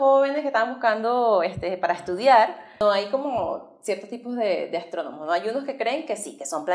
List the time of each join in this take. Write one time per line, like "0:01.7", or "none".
0:02.8